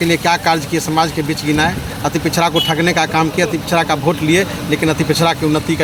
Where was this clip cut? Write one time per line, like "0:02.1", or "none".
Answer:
none